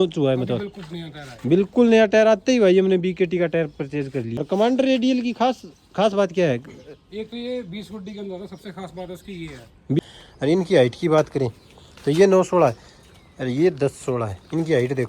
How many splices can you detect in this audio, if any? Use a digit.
2